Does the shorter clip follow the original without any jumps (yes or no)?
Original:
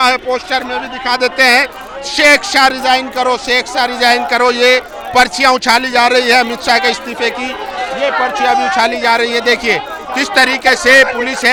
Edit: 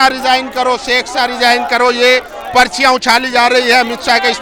yes